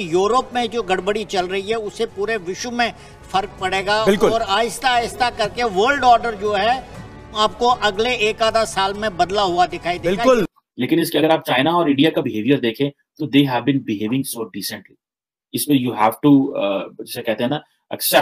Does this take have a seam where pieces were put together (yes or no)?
yes